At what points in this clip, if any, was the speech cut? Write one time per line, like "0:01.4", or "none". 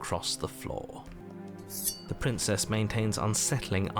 0:01.1